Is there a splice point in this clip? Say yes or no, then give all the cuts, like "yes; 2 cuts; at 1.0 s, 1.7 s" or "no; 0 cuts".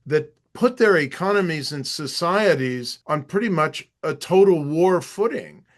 yes; 1 cut; at 2.9 s